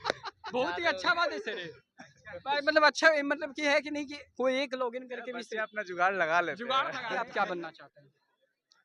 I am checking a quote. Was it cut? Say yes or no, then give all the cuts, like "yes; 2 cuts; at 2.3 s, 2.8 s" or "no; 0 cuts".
yes; 1 cut; at 7.0 s